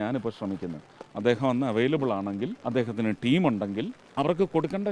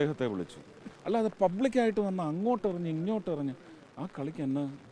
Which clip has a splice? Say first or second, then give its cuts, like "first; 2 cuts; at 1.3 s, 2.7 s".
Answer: first; 2 cuts; at 2.6 s, 4.0 s